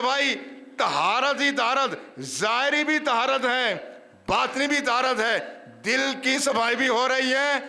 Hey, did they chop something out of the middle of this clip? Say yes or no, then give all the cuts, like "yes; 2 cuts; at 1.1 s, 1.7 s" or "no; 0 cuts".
no; 0 cuts